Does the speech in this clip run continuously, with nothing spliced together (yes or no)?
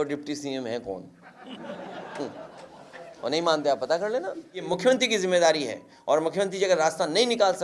no